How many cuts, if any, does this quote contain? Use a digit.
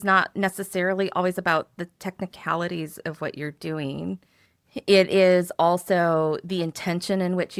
0